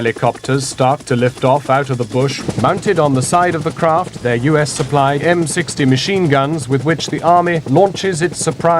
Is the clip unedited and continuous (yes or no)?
no